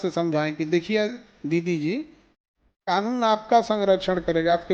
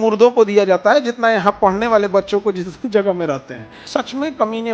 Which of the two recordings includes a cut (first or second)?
second